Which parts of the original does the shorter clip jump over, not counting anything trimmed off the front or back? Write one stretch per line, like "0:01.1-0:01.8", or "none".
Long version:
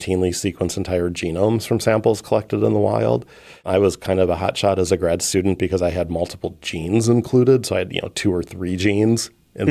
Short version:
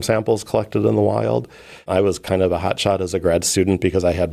none